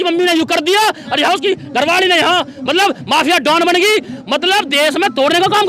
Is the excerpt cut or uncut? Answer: uncut